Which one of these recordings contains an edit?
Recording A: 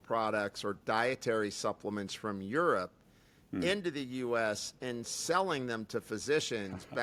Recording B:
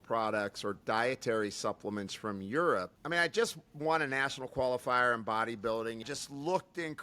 B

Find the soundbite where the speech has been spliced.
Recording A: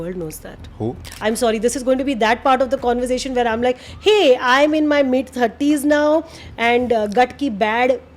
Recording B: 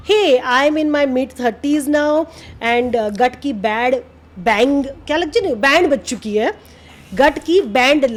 A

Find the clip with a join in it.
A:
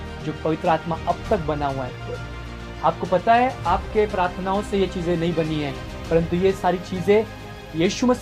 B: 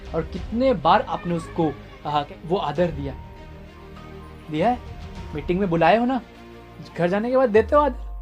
B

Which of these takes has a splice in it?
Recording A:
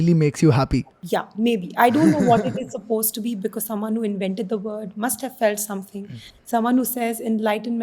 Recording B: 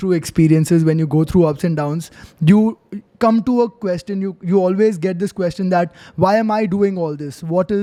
A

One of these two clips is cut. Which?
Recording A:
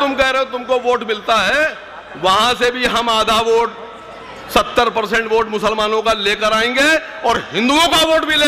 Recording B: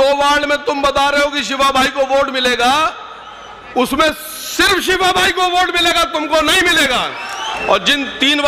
B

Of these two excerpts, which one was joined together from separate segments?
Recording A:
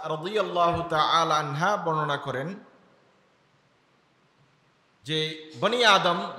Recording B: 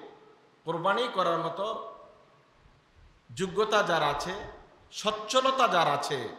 A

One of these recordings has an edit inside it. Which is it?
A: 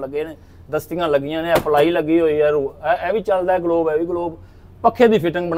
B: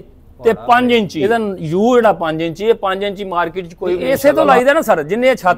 B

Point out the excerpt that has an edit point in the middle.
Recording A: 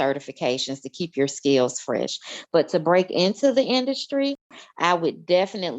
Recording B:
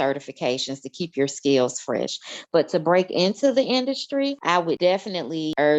B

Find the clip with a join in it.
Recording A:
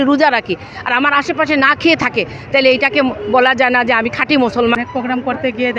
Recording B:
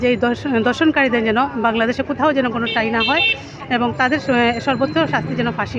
A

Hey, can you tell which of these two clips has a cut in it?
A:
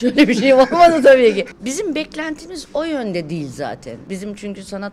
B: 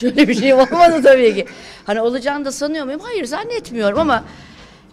A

